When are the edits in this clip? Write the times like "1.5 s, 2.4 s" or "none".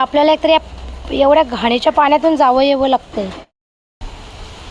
3.6 s